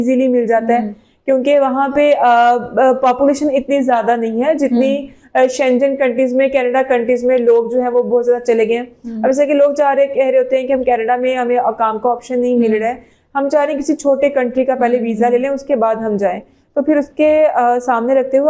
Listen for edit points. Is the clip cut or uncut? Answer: uncut